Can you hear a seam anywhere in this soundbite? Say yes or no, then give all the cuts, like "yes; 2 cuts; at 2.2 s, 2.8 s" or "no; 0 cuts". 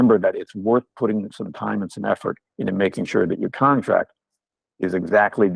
no; 0 cuts